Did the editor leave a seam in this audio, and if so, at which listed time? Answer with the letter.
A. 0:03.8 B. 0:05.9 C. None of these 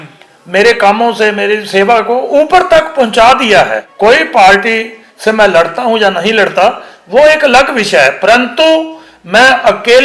A